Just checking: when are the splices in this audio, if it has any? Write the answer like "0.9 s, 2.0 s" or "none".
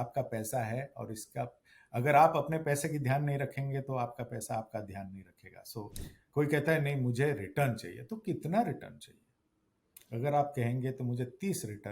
6.1 s

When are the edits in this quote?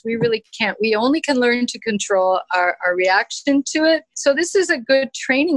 4.1 s

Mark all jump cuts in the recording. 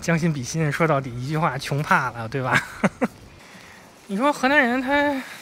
3.3 s

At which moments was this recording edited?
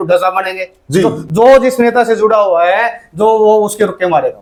none

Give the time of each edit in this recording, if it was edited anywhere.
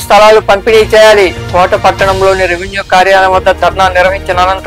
none

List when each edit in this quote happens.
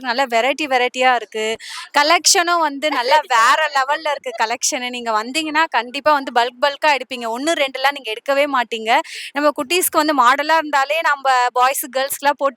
none

